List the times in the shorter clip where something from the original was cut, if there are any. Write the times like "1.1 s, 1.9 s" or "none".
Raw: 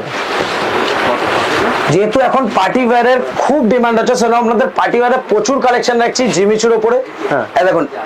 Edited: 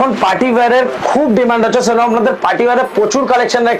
none